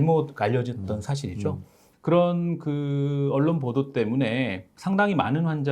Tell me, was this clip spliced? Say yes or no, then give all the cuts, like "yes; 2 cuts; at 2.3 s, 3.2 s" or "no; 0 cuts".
yes; 1 cut; at 1.8 s